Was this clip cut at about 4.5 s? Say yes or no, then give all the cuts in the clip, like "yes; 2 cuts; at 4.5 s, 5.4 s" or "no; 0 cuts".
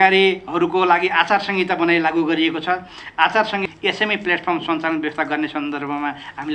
no; 0 cuts